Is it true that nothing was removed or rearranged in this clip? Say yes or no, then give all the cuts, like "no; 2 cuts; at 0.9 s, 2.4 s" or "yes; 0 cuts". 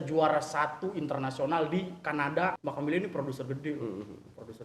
no; 1 cut; at 2.6 s